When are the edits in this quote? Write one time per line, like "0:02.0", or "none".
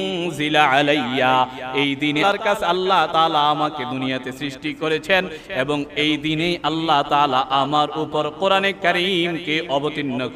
0:02.2